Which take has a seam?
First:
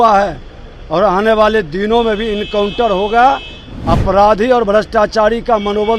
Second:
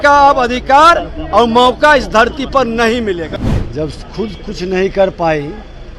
second; 1 cut; at 3.3 s

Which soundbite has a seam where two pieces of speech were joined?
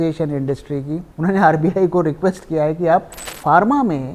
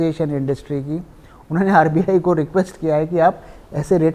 first; 2 cuts; at 1.1 s, 3.3 s

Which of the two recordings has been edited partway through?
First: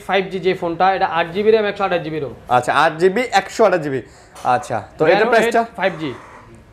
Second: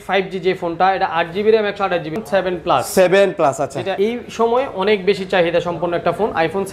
second; 2 cuts; at 2.2 s, 3.9 s

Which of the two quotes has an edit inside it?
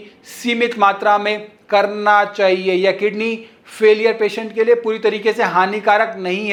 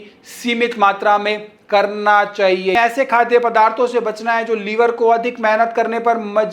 second; 1 cut; at 2.7 s

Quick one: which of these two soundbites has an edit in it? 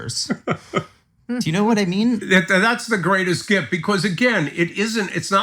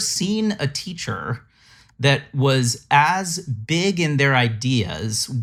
first; 1 cut; at 2.2 s

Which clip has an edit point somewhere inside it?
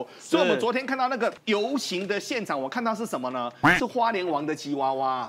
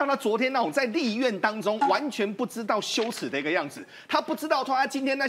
first; 1 cut; at 1.4 s

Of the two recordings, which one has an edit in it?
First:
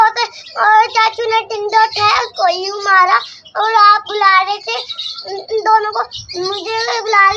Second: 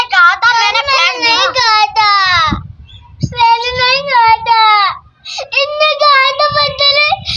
first; 1 cut; at 3.3 s

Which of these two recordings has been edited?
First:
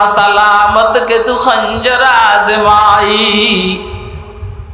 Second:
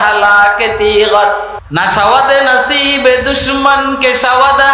second; 1 cut; at 1.6 s

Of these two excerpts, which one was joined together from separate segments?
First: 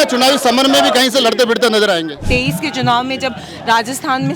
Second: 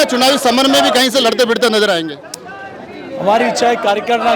first; 1 cut; at 2.2 s

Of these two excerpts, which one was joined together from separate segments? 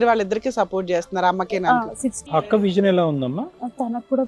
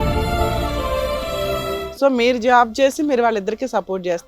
second; 1 cut; at 1.8 s

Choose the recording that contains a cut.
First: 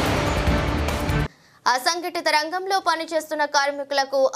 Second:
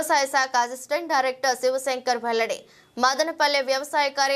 first; 1 cut; at 0.9 s

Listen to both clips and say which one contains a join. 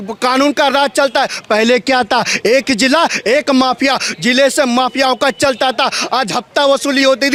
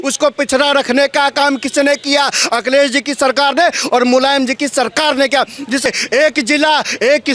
second; 1 cut; at 5.9 s

